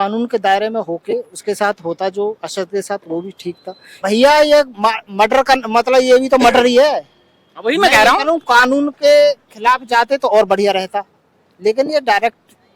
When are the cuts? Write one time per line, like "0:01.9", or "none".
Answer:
0:03.9